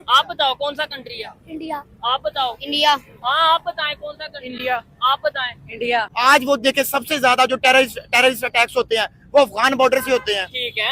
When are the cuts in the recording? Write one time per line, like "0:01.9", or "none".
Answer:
0:06.1